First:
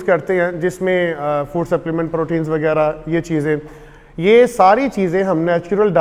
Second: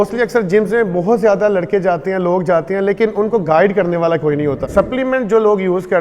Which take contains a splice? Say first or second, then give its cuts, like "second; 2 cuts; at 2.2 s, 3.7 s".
second; 1 cut; at 4.6 s